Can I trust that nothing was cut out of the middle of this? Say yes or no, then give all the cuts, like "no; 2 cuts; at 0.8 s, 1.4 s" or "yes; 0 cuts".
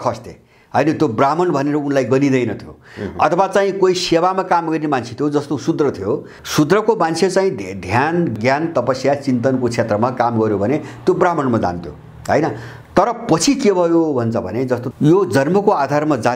no; 2 cuts; at 6.4 s, 14.9 s